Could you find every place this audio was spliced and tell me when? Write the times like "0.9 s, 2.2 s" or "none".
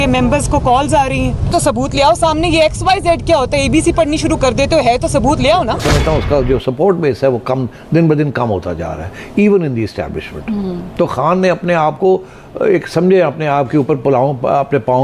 1.4 s, 5.8 s